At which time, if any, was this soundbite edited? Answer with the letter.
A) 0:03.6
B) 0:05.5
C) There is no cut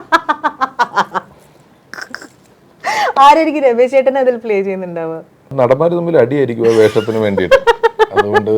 B